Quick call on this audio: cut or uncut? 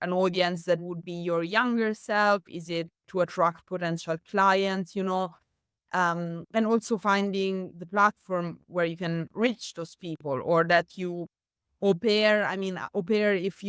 uncut